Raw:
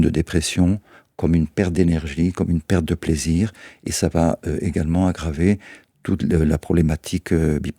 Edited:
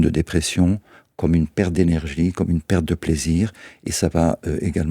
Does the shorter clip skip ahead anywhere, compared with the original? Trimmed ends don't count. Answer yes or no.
no